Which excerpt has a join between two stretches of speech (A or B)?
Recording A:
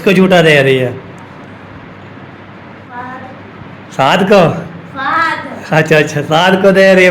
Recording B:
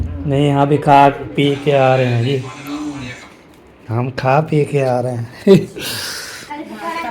A